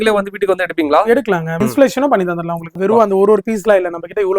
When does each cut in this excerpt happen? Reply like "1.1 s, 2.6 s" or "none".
1.6 s, 2.7 s